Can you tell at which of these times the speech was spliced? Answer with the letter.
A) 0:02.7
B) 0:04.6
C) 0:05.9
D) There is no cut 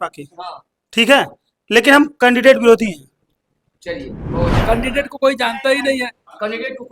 B